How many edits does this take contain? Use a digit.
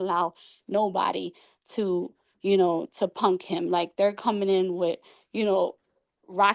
0